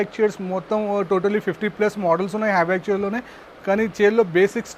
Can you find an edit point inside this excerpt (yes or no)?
no